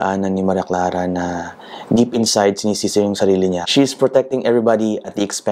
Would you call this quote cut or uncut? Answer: cut